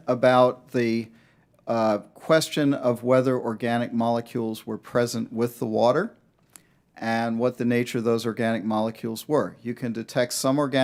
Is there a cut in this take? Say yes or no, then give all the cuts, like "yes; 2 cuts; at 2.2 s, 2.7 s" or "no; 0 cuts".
no; 0 cuts